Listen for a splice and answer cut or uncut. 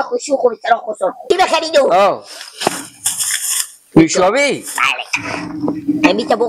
cut